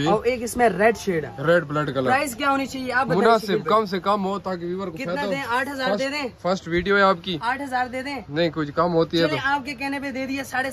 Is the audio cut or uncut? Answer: uncut